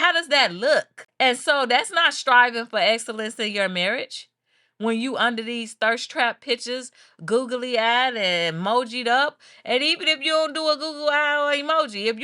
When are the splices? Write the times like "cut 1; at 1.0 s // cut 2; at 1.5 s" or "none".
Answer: cut 1; at 1.0 s